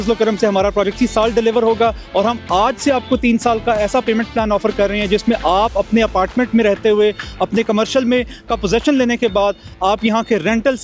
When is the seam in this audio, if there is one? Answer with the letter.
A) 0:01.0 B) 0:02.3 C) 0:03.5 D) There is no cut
A